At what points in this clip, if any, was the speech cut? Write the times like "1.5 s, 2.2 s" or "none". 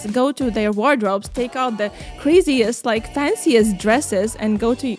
none